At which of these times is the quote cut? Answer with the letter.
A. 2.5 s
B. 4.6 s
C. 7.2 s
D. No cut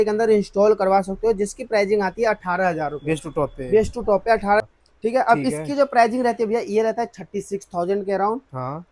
B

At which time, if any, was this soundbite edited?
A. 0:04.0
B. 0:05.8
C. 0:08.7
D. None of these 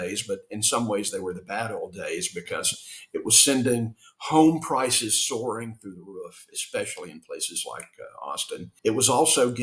C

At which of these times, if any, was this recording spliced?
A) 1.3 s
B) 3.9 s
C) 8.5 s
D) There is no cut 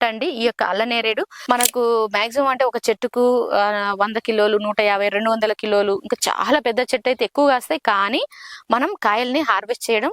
A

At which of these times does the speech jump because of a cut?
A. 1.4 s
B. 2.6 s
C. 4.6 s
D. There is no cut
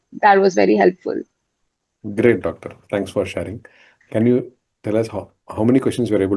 D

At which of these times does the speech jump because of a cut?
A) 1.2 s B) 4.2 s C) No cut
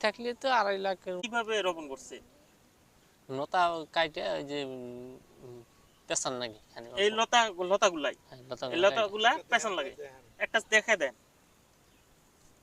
A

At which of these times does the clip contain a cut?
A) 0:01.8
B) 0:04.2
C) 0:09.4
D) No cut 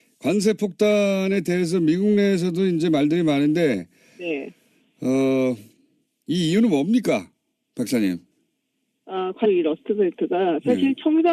D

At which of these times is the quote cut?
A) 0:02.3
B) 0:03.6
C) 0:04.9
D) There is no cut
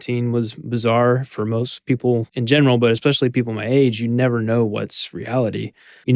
A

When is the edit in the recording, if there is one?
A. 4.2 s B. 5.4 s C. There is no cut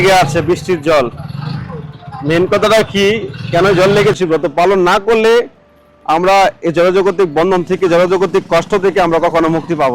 A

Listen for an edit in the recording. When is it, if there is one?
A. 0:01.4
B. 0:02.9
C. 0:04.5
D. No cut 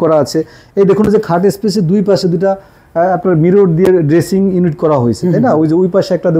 D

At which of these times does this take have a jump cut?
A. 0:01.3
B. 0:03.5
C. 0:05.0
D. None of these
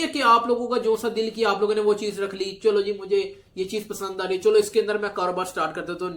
D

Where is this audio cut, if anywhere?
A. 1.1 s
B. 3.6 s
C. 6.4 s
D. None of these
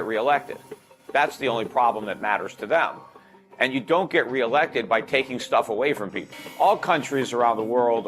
C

